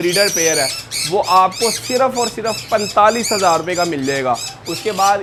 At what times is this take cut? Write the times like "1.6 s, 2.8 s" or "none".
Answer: none

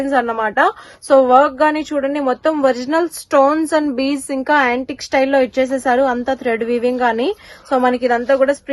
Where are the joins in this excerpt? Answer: none

